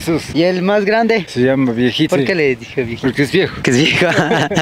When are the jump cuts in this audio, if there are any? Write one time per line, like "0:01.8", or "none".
0:03.6